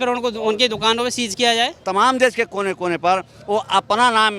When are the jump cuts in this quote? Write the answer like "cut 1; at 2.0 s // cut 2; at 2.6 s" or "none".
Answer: cut 1; at 1.8 s